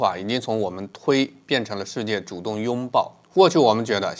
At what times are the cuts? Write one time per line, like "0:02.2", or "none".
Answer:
0:03.2